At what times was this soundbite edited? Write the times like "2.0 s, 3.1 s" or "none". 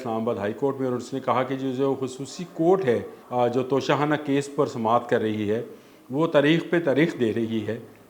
3.2 s

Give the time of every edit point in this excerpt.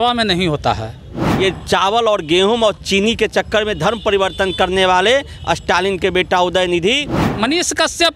1.3 s, 7.2 s

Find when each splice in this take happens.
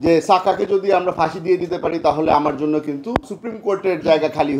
3.4 s

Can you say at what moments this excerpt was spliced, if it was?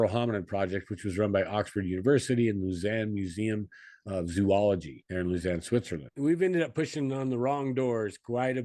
5.0 s, 6.0 s

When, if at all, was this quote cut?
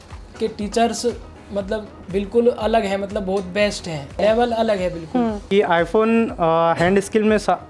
2.0 s, 4.2 s, 5.5 s

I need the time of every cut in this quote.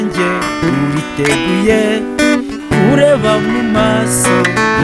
none

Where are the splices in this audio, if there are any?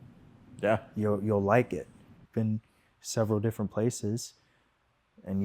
2.2 s

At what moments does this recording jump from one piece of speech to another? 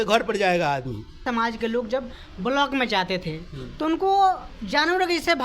1.2 s

